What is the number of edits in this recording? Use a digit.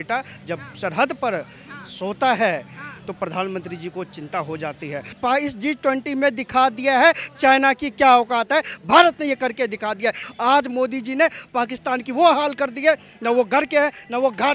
2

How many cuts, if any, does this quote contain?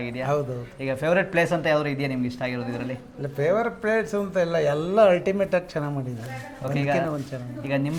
0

